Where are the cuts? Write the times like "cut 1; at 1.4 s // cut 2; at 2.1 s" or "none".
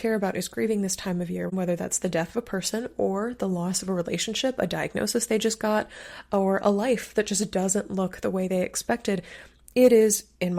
cut 1; at 1.5 s